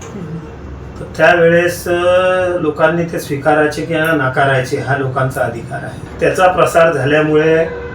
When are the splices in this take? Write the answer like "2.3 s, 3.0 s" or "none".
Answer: 6.0 s

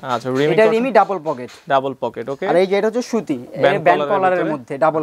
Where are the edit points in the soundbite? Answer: none

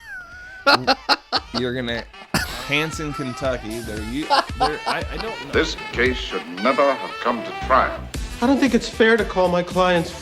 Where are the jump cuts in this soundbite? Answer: 5.4 s

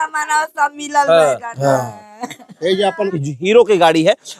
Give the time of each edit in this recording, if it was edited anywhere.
3.1 s

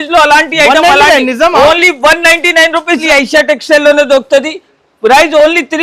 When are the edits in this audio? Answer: 3.0 s

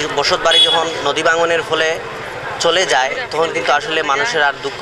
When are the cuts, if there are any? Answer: none

